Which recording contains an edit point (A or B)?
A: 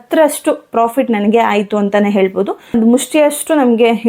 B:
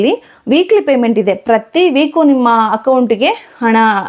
A